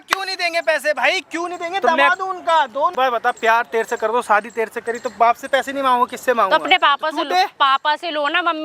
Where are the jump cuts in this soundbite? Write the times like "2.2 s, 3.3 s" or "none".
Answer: 2.9 s